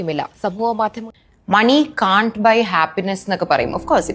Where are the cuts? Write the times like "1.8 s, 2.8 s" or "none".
1.0 s